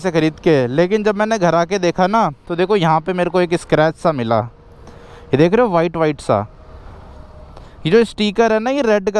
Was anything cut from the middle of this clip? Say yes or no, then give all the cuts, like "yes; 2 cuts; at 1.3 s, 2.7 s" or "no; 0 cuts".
no; 0 cuts